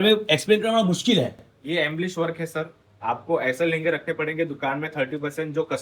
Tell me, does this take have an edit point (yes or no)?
no